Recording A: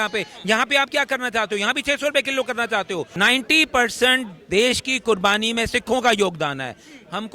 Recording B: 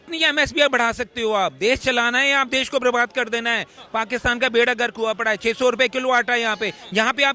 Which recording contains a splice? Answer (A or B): A